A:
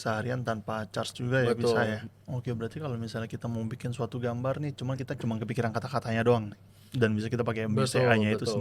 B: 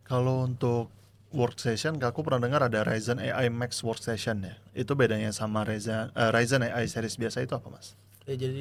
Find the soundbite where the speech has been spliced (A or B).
A